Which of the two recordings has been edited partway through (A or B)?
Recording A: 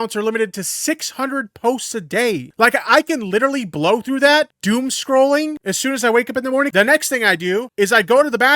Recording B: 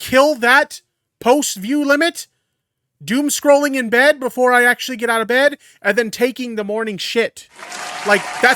A